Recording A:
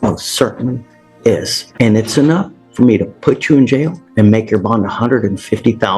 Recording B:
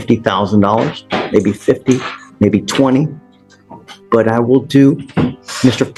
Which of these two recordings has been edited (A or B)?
A